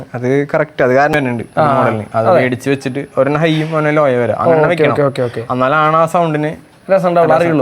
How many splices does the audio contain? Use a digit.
1